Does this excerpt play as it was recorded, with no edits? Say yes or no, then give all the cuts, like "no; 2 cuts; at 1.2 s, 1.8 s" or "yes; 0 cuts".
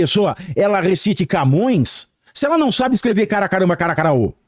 yes; 0 cuts